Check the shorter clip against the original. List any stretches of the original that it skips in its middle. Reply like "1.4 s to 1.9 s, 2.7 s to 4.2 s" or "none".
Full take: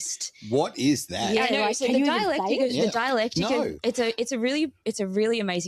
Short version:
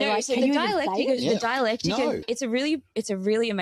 3.8 s to 4.2 s